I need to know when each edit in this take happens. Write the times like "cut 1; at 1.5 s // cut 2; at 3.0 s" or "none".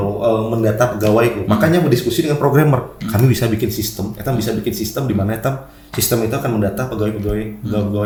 none